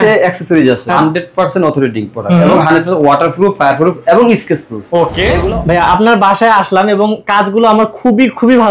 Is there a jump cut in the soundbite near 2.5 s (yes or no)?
no